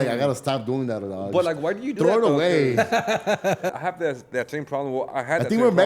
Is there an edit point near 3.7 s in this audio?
yes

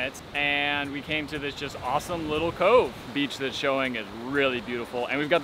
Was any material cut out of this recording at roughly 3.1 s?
yes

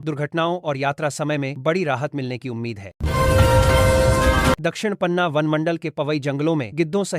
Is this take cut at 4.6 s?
yes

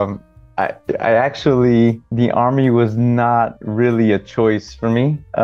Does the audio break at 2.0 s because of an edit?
yes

